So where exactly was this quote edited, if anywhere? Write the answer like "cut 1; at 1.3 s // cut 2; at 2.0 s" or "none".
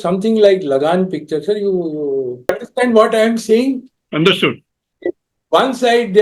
cut 1; at 2.5 s